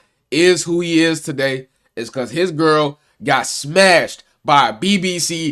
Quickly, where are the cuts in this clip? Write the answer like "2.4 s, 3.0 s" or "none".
none